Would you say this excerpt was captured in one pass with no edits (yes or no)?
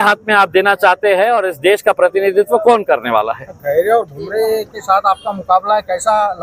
yes